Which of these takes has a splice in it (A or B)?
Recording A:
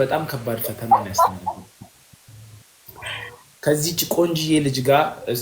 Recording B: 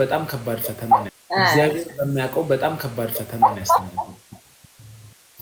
A